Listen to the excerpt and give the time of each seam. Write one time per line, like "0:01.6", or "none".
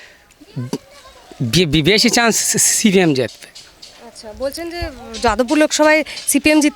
none